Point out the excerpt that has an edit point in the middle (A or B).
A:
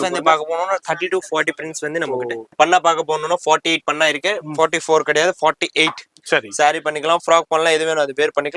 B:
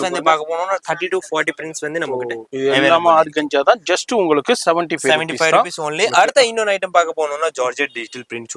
A